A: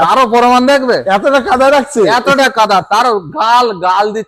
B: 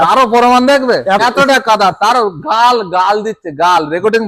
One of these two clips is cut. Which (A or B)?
B